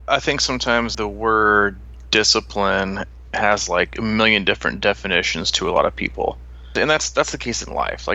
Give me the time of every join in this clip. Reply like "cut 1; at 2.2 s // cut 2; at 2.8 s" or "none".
cut 1; at 0.9 s // cut 2; at 6.7 s